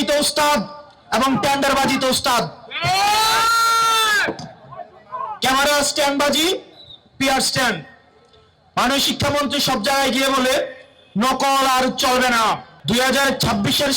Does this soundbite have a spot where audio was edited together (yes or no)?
yes